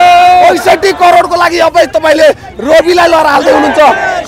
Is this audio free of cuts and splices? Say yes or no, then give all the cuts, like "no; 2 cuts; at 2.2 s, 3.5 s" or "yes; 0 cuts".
yes; 0 cuts